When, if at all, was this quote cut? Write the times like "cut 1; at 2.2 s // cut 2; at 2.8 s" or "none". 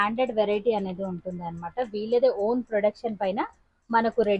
none